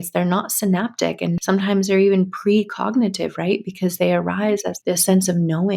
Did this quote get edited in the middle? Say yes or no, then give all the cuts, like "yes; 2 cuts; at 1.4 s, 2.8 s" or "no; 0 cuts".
yes; 2 cuts; at 1.4 s, 4.7 s